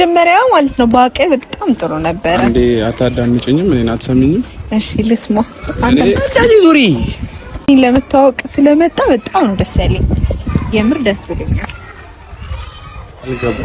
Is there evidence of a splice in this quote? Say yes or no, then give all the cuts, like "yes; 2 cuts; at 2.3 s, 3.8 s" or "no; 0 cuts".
yes; 1 cut; at 7.7 s